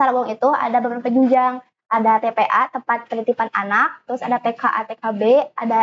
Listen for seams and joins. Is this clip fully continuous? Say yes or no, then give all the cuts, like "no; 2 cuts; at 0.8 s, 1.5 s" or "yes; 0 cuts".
yes; 0 cuts